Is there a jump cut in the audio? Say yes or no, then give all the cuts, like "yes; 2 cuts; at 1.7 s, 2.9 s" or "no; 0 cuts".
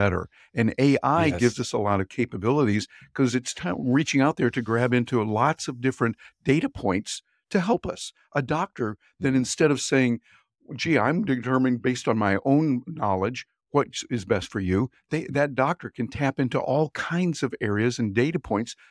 no; 0 cuts